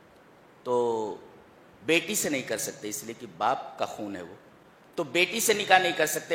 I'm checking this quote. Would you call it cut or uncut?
uncut